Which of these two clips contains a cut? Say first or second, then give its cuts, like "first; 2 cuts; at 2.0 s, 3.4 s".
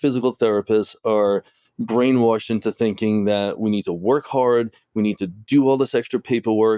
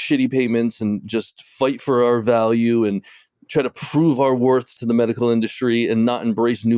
second; 1 cut; at 4.7 s